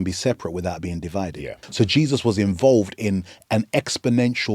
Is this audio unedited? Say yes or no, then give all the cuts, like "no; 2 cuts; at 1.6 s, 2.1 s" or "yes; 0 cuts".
no; 1 cut; at 1.6 s